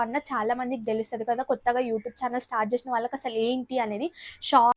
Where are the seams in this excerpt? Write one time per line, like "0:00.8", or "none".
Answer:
none